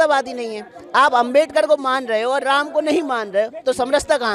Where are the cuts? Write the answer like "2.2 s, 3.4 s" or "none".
none